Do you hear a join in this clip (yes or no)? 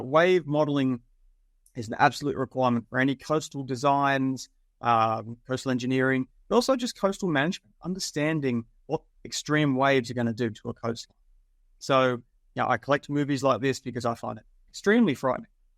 no